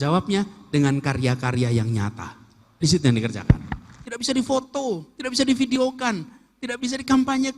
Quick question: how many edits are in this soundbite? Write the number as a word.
one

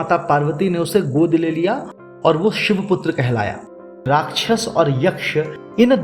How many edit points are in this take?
one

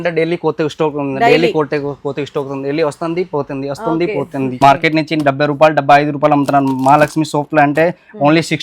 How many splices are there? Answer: one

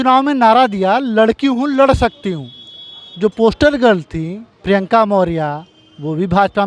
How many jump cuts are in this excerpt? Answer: zero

